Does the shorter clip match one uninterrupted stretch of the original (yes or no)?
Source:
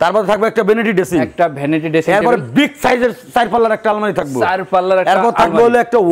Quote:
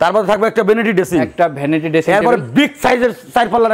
yes